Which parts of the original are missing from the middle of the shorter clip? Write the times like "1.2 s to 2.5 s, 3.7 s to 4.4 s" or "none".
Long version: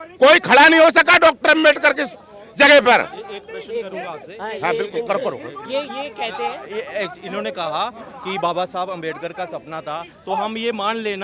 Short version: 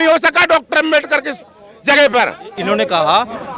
3.3 s to 7.2 s